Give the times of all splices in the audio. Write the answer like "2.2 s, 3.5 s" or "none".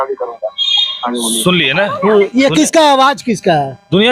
none